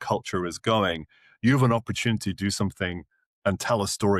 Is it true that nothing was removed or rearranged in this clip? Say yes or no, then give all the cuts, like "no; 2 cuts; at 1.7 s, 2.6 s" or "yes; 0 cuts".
yes; 0 cuts